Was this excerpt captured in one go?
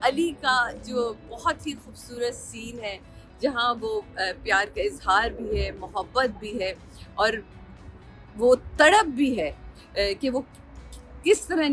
yes; 0 cuts

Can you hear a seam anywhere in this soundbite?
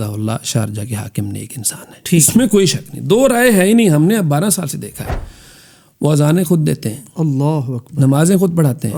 no; 0 cuts

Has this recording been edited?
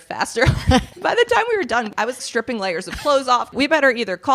yes; 3 cuts; at 0.9 s, 2.2 s, 3.5 s

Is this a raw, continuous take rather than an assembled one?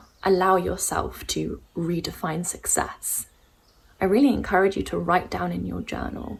yes; 0 cuts

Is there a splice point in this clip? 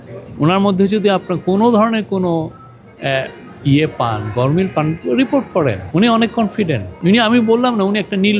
yes; 2 cuts; at 5.8 s, 6.9 s

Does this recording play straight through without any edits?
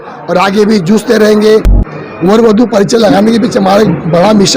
no; 1 cut; at 1.6 s

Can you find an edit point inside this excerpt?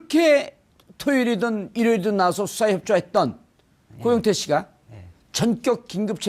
no; 0 cuts

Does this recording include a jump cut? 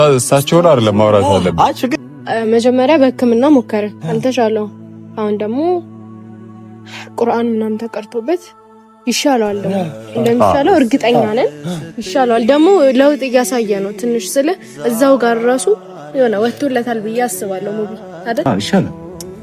yes; 2 cuts; at 1.9 s, 18.4 s

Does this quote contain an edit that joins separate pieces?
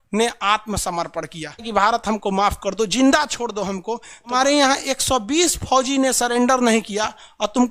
yes; 2 cuts; at 1.7 s, 4.3 s

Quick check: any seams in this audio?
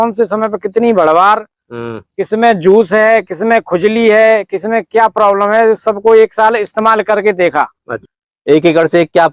yes; 1 cut; at 7.9 s

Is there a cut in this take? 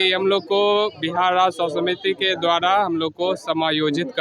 no; 0 cuts

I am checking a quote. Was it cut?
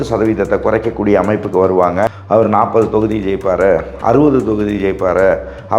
yes; 1 cut; at 2.1 s

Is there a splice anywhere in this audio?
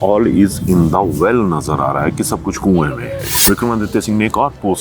yes; 1 cut; at 3.3 s

